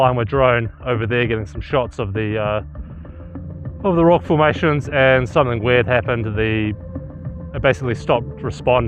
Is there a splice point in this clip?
no; 0 cuts

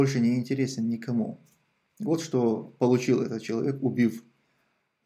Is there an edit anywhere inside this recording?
no; 0 cuts

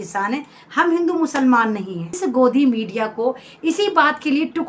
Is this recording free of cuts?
no; 1 cut; at 2.2 s

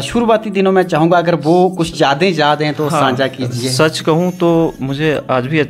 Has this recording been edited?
no; 0 cuts

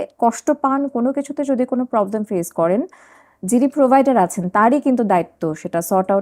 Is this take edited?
no; 0 cuts

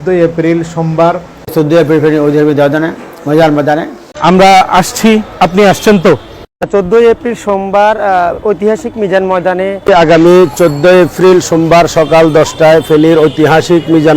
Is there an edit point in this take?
yes; 1 cut; at 1.3 s

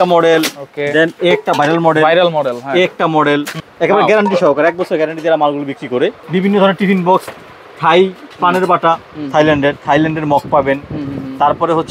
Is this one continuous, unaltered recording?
no; 2 cuts; at 3.6 s, 6.2 s

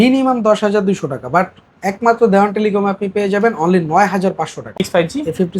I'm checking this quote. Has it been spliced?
yes; 1 cut; at 4.7 s

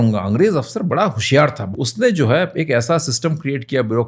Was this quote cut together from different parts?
yes; 1 cut; at 1.6 s

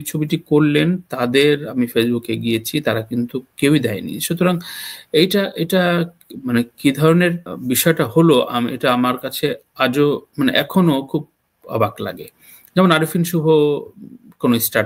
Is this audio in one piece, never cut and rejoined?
yes; 0 cuts

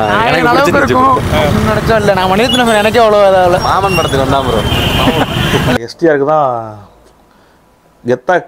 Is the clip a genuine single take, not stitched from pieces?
no; 1 cut; at 5.8 s

